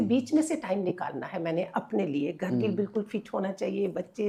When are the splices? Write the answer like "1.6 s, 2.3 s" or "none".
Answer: none